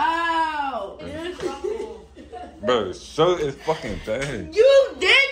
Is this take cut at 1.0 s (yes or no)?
yes